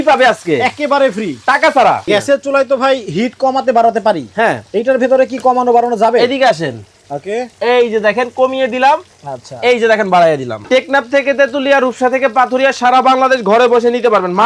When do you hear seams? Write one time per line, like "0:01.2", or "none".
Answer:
0:02.0
0:10.6